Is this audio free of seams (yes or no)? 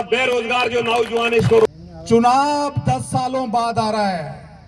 no